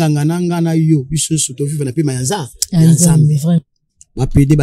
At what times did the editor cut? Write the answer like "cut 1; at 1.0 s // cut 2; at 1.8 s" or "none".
cut 1; at 3.6 s